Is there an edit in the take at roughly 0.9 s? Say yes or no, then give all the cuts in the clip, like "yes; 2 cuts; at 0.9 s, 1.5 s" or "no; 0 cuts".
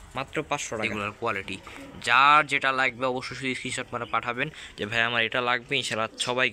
yes; 1 cut; at 0.9 s